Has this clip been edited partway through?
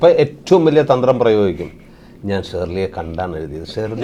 no; 0 cuts

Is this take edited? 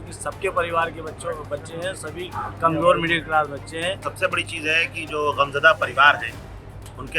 yes; 1 cut; at 4.1 s

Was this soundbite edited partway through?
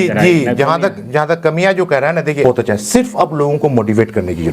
yes; 1 cut; at 2.4 s

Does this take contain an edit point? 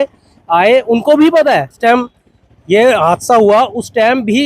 yes; 1 cut; at 1.7 s

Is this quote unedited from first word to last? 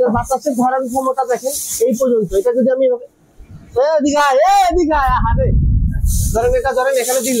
yes; 0 cuts

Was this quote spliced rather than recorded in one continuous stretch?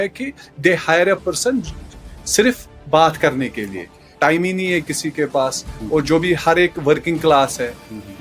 yes; 1 cut; at 4.0 s

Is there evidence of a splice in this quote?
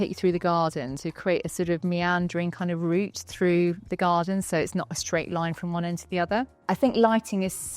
yes; 1 cut; at 6.6 s

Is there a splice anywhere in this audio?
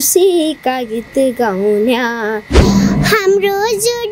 yes; 1 cut; at 2.5 s

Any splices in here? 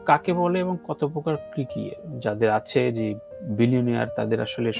no; 0 cuts

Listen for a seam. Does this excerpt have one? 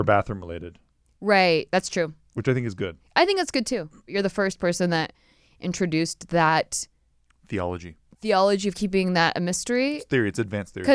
yes; 1 cut; at 4.1 s

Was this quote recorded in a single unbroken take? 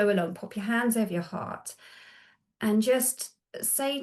yes; 0 cuts

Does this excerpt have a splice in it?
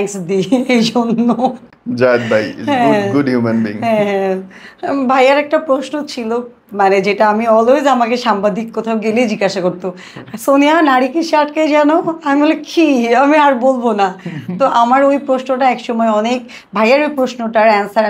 no; 0 cuts

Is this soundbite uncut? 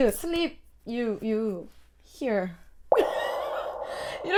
yes; 0 cuts

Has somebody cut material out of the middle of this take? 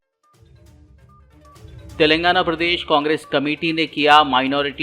yes; 1 cut; at 1.2 s

